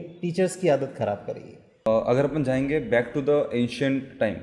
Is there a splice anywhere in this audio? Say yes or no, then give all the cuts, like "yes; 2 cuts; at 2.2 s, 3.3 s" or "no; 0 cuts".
yes; 1 cut; at 1.9 s